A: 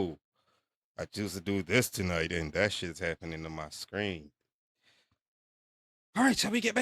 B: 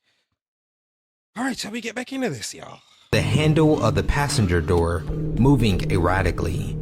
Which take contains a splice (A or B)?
B